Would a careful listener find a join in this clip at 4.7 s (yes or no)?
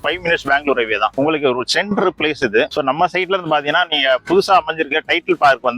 no